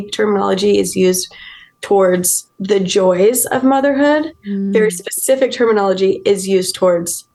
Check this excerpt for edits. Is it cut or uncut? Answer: uncut